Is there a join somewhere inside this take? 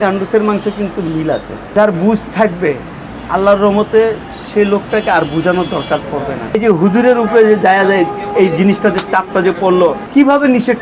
yes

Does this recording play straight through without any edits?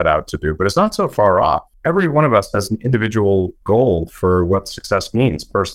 no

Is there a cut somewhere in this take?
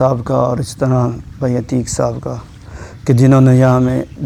no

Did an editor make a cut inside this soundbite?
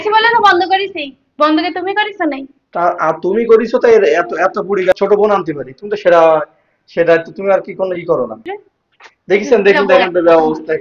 yes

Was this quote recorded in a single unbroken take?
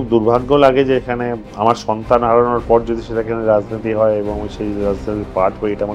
no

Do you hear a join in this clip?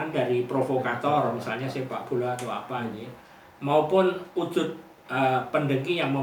no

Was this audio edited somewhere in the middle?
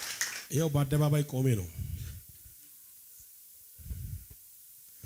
no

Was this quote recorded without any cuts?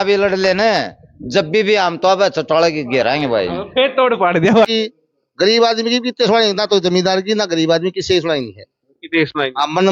no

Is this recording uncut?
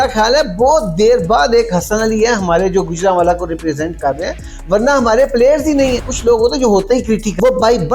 no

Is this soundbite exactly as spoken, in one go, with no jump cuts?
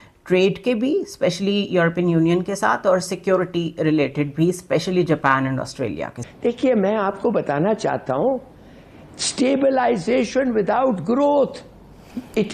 no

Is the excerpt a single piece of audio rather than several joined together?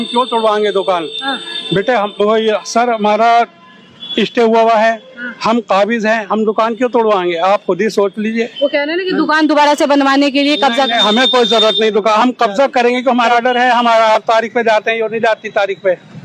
yes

